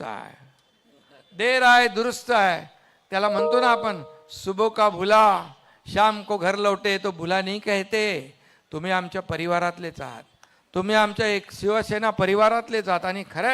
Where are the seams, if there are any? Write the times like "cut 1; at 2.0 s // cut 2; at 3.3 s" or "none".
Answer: cut 1; at 3.3 s